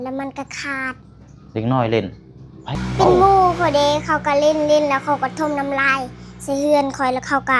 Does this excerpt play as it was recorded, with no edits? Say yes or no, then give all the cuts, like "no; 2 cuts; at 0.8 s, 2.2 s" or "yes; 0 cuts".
no; 1 cut; at 2.7 s